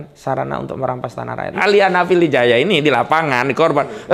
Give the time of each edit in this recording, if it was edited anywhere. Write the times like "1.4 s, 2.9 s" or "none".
1.5 s